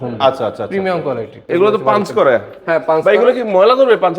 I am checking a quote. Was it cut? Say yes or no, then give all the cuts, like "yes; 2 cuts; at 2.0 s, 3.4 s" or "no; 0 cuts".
yes; 1 cut; at 1.4 s